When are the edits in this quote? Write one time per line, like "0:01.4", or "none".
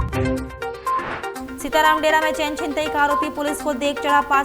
0:01.4